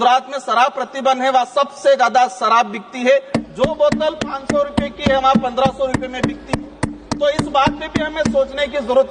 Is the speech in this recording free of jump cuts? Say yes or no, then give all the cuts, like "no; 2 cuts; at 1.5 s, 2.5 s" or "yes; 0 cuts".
yes; 0 cuts